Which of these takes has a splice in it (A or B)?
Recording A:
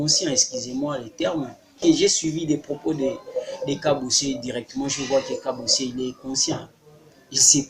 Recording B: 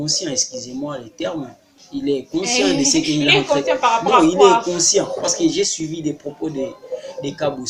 A